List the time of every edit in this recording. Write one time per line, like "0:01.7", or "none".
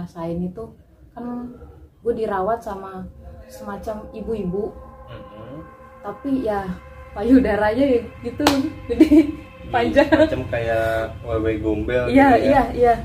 none